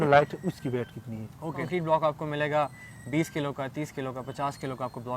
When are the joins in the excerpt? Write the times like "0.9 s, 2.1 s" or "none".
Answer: 1.6 s